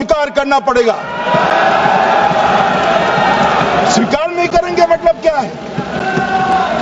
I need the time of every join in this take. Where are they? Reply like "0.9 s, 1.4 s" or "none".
none